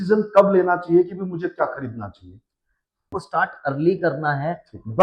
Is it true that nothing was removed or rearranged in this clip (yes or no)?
no